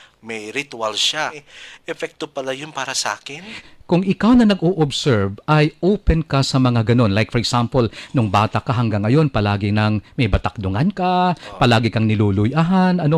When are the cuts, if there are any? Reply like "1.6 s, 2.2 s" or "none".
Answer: 1.4 s, 3.6 s